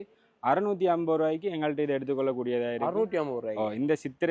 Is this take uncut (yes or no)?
yes